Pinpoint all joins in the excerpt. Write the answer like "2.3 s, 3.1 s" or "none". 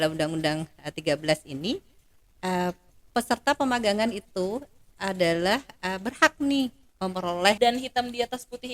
7.6 s